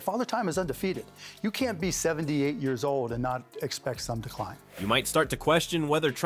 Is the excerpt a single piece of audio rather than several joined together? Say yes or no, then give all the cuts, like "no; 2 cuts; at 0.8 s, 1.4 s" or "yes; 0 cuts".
yes; 0 cuts